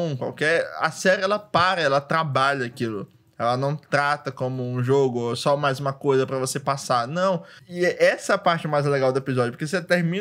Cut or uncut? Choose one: uncut